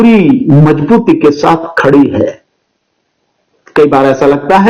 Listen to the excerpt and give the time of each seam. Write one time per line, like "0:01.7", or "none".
none